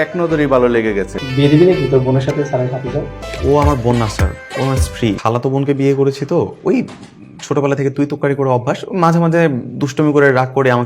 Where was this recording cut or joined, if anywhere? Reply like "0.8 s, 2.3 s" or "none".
1.2 s, 3.2 s, 5.2 s

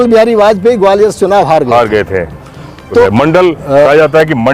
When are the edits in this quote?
3.0 s

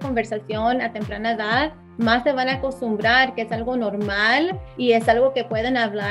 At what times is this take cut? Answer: 1.8 s, 4.7 s

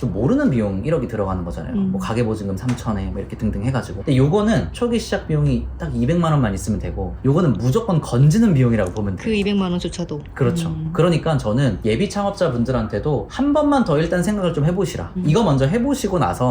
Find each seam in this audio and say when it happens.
none

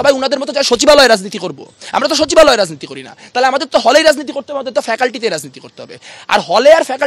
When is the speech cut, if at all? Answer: none

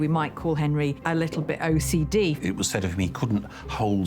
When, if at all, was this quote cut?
2.4 s

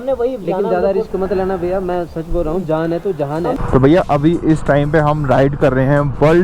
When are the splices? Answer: 3.6 s

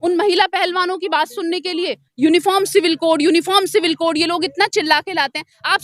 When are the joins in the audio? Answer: 2.0 s

